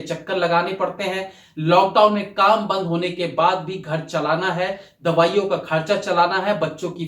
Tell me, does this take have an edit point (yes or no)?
no